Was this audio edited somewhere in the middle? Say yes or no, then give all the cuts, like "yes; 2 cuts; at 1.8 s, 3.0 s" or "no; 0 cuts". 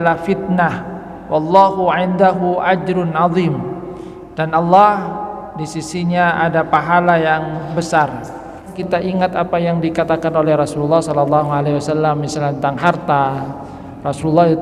yes; 1 cut; at 8.8 s